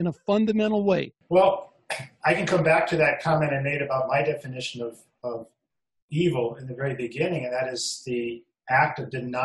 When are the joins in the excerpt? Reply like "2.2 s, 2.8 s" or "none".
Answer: 1.2 s